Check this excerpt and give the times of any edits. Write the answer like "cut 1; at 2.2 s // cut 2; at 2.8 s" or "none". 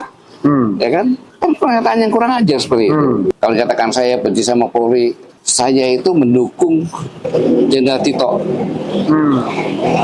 cut 1; at 3.3 s